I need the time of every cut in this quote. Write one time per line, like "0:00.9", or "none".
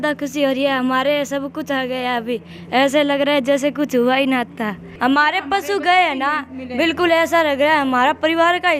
0:04.8